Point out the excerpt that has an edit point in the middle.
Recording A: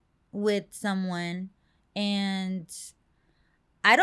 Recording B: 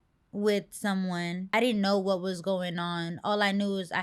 B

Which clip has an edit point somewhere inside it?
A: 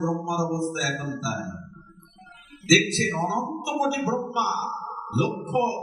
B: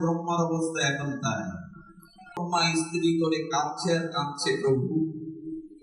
B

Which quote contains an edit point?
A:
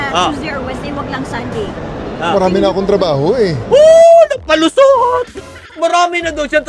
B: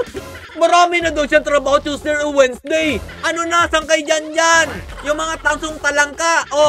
B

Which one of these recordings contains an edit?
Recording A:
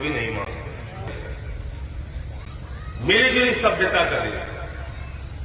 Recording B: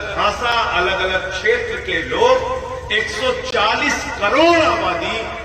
A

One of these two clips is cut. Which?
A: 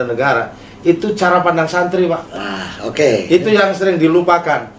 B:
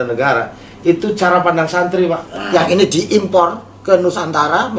B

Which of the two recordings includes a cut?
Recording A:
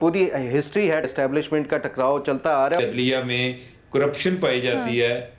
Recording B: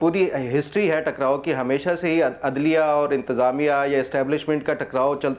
A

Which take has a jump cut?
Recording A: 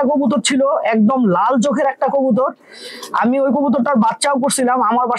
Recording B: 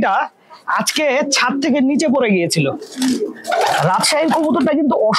B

